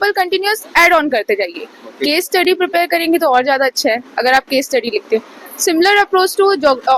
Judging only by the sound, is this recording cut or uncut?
uncut